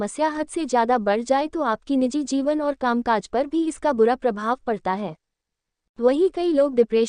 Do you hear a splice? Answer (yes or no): no